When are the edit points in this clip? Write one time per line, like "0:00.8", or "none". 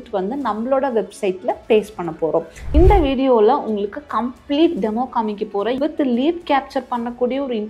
0:02.6
0:05.8